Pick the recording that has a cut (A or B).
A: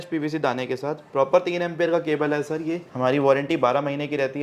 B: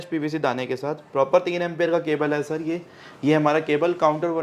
A